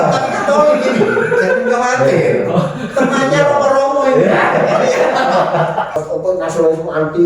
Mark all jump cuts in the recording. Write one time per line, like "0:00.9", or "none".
0:06.0